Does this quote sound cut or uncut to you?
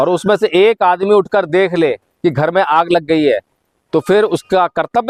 uncut